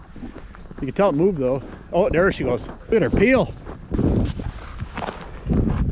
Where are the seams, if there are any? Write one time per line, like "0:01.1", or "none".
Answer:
0:02.9
0:03.9